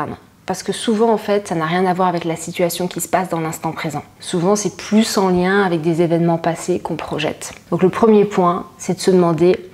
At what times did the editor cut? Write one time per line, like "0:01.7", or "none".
0:04.1
0:07.5